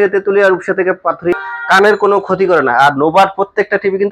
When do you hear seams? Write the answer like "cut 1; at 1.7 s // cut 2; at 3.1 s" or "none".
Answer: cut 1; at 1.3 s